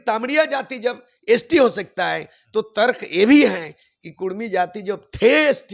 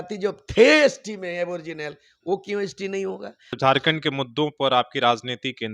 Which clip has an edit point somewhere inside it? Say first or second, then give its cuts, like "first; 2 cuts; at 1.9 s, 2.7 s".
second; 1 cut; at 3.4 s